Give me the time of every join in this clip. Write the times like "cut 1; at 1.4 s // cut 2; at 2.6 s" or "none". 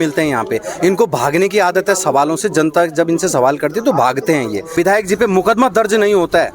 cut 1; at 4.7 s